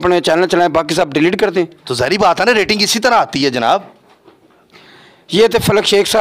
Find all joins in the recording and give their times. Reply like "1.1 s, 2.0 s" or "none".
none